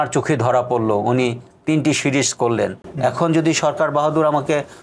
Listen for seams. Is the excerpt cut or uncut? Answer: cut